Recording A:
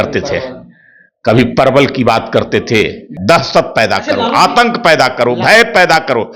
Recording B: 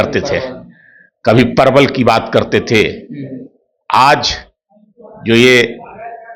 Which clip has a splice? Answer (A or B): A